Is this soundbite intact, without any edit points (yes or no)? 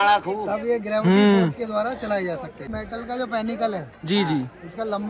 no